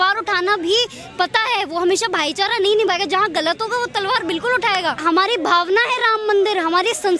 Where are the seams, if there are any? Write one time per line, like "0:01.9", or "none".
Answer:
0:05.0

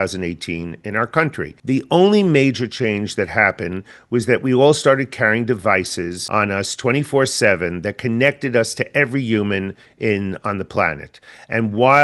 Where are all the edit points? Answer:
0:01.5
0:06.2

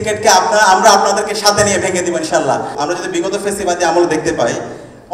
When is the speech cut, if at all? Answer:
0:02.7

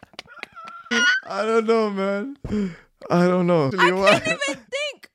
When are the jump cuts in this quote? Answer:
0:00.9
0:03.7

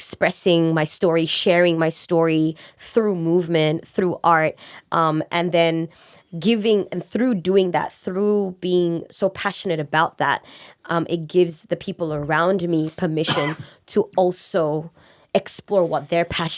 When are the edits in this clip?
none

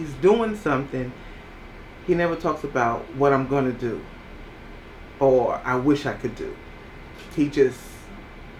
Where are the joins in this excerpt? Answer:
none

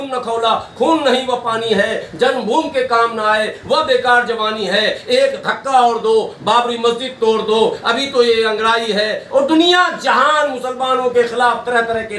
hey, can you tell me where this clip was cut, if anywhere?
none

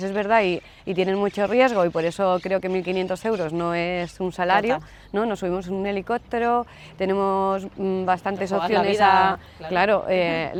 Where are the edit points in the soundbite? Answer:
none

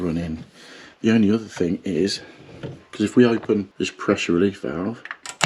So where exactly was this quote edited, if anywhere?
0:03.7

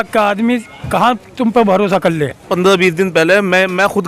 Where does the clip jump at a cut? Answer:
0:02.4

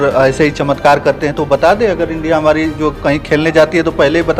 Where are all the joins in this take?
none

